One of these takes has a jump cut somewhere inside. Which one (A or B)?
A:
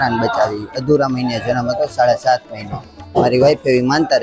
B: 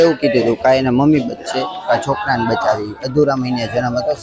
A